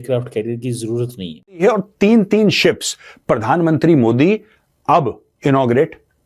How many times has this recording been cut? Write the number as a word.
one